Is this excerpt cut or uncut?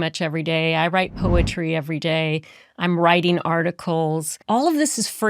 cut